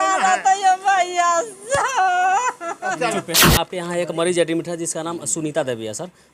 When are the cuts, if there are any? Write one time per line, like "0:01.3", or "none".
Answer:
0:03.5

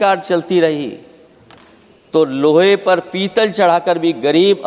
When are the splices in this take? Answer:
none

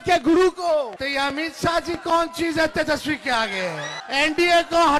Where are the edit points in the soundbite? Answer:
0:01.0
0:03.9

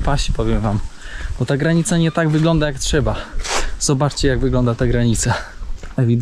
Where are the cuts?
none

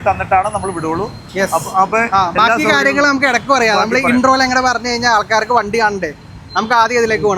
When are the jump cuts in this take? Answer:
none

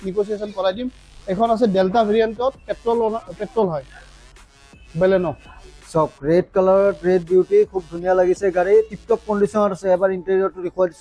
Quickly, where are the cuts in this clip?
none

